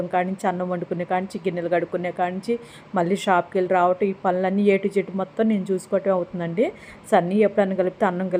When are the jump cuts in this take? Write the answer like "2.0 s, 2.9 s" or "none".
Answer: none